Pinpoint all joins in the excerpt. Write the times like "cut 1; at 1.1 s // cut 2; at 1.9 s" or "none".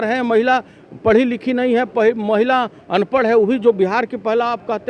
none